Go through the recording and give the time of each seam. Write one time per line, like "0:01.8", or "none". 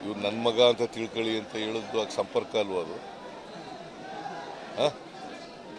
none